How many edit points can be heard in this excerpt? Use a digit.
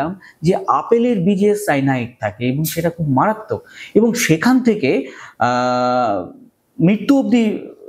0